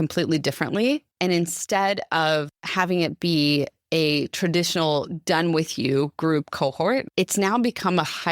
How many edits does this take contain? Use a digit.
3